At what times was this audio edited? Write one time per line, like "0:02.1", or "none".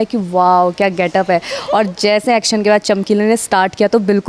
none